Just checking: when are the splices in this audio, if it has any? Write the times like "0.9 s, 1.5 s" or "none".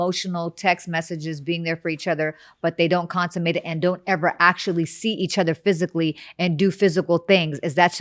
none